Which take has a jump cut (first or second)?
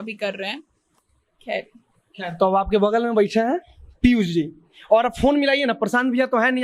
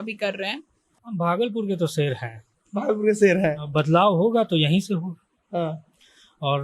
second